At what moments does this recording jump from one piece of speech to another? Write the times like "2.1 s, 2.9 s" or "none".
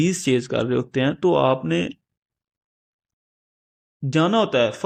none